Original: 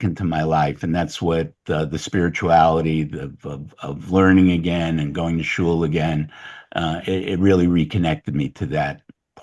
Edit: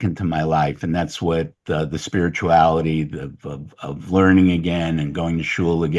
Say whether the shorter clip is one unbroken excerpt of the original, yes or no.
yes